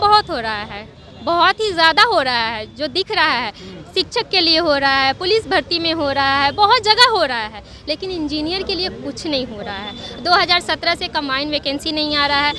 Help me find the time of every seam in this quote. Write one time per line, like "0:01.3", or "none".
none